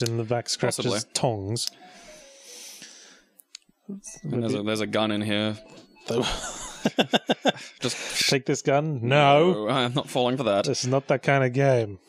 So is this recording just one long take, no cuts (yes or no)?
no